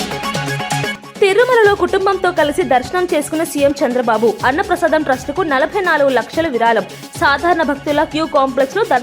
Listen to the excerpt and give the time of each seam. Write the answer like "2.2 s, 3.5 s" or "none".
1.0 s